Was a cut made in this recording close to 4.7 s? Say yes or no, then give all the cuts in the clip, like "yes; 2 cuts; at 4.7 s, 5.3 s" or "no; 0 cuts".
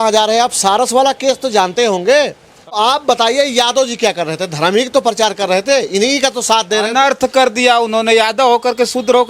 no; 1 cut; at 2.8 s